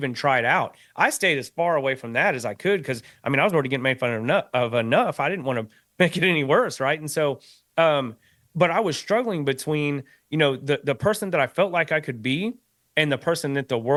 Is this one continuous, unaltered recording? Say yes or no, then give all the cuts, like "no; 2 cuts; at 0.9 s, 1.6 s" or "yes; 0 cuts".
yes; 0 cuts